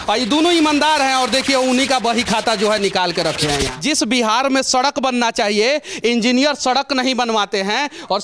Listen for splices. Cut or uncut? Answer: cut